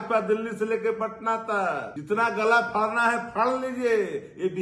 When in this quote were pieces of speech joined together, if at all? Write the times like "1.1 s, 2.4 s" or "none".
1.9 s